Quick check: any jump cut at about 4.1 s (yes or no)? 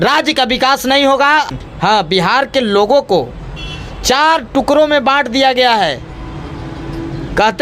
no